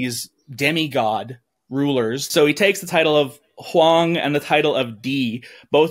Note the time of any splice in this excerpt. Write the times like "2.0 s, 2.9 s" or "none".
2.2 s